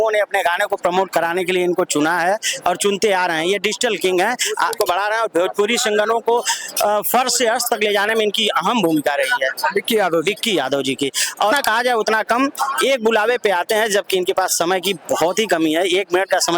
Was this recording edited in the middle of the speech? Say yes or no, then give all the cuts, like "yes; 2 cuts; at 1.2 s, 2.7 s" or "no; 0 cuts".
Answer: yes; 2 cuts; at 4.8 s, 11.5 s